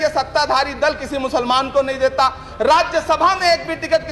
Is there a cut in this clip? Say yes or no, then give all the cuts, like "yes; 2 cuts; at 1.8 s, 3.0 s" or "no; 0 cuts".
no; 0 cuts